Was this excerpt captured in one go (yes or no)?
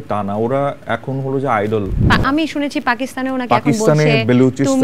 no